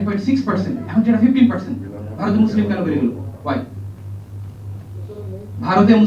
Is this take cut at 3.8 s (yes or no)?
no